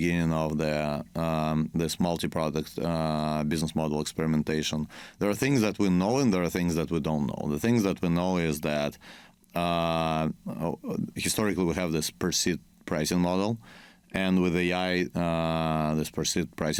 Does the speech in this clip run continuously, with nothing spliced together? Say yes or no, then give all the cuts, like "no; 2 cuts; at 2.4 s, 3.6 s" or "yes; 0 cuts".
yes; 0 cuts